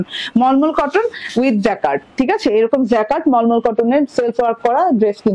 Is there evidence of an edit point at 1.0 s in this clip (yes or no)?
no